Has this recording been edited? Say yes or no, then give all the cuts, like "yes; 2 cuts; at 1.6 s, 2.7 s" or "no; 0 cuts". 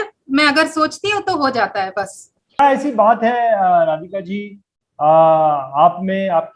yes; 1 cut; at 2.6 s